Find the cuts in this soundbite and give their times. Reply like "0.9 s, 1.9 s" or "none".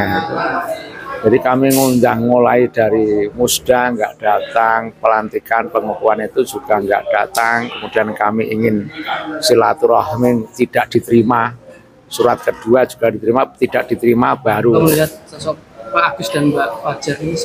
14.8 s